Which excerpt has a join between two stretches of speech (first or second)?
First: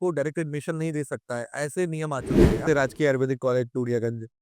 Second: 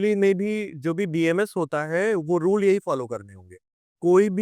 first